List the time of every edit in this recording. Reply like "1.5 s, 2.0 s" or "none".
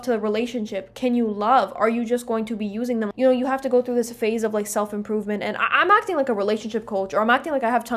none

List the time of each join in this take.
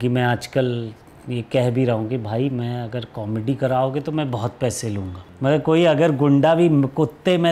5.2 s

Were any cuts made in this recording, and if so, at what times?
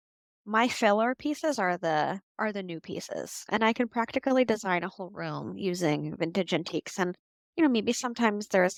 none

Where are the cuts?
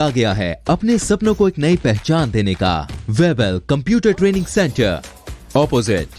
2.9 s

